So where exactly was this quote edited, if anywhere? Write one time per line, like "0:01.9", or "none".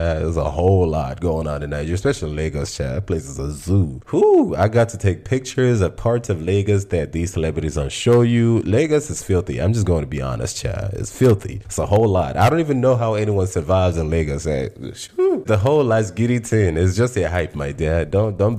none